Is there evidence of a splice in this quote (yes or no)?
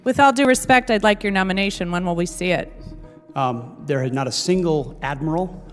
no